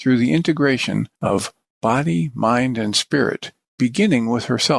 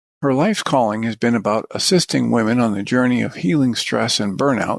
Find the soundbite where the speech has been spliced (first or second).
first